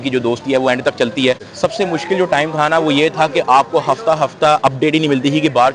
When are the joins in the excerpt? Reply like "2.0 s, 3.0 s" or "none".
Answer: 1.5 s